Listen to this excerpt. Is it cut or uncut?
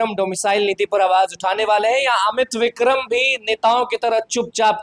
uncut